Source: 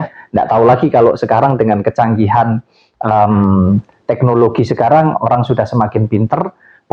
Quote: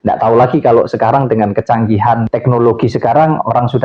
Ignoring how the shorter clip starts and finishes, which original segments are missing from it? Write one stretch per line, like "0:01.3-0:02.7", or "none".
0:02.6-0:04.1